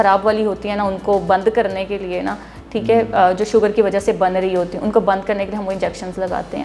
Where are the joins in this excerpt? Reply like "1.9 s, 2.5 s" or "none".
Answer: none